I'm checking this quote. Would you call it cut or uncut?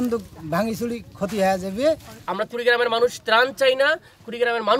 cut